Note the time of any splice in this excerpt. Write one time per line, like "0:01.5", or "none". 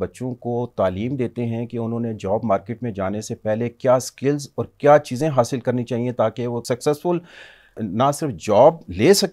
0:06.6
0:07.7